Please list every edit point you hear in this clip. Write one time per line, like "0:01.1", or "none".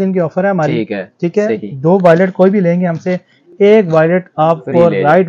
none